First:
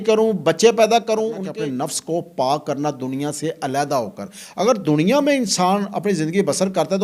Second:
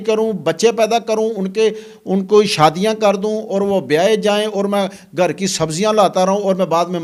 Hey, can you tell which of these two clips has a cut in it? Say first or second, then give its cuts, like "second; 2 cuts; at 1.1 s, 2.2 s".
first; 1 cut; at 1.4 s